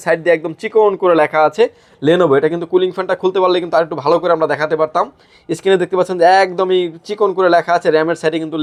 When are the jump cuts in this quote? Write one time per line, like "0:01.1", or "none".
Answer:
none